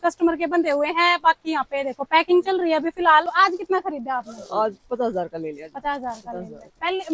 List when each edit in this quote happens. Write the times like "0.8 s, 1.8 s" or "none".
3.3 s